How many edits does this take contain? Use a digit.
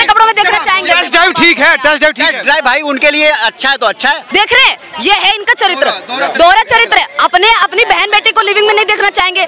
2